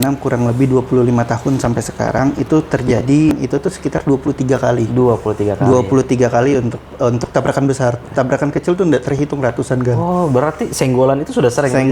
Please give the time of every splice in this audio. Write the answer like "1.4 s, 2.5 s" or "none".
3.3 s